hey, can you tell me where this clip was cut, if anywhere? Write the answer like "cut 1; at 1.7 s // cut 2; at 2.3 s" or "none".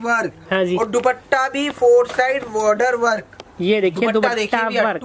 none